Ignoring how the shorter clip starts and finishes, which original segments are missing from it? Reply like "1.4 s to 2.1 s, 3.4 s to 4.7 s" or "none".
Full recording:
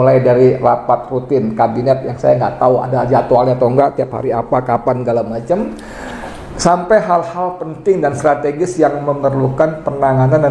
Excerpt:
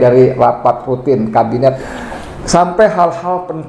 2.1 s to 6.0 s